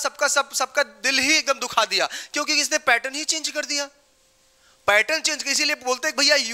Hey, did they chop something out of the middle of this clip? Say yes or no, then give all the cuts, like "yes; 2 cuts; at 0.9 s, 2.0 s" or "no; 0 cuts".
no; 0 cuts